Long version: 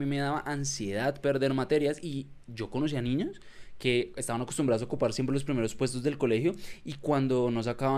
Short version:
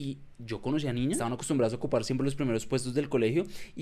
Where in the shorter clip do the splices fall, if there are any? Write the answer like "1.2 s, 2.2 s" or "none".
1.2 s